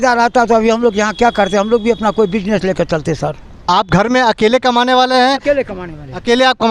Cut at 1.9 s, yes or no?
no